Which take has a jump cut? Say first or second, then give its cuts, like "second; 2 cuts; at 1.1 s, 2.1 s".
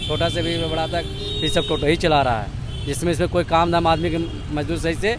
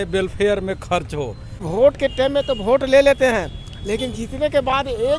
second; 1 cut; at 1.6 s